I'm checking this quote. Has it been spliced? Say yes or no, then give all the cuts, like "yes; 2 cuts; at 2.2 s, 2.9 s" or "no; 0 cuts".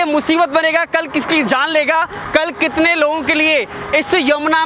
no; 0 cuts